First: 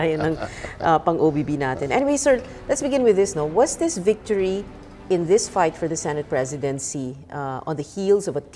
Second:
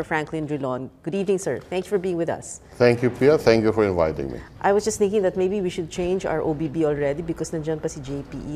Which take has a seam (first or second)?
first